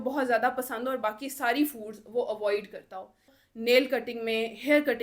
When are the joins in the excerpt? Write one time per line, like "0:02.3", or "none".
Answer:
0:03.4